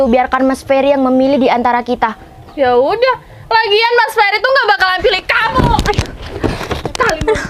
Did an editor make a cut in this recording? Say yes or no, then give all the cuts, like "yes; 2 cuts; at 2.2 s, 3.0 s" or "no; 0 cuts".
no; 0 cuts